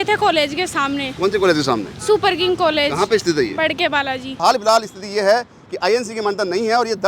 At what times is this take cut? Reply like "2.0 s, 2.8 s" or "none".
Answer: 4.3 s